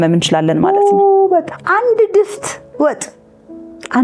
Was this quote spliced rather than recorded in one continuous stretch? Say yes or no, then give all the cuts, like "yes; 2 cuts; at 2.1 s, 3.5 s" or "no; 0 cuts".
yes; 1 cut; at 1.6 s